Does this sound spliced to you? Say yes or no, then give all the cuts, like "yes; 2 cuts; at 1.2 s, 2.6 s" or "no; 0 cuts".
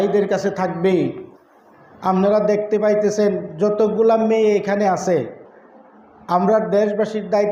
no; 0 cuts